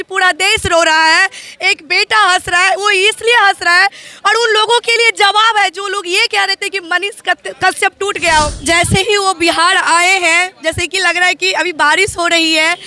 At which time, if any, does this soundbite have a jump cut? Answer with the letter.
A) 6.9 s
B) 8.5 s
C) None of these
B